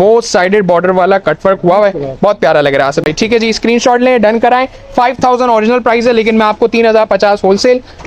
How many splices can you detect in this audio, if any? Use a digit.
0